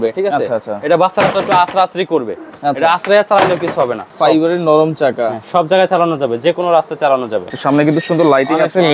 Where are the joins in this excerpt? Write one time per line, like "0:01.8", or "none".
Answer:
0:04.1
0:07.5

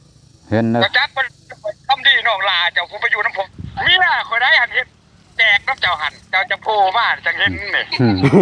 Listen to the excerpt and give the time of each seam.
0:03.4

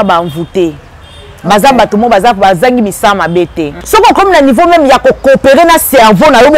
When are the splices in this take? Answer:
0:03.7

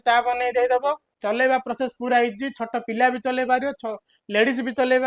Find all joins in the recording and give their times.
0:01.1

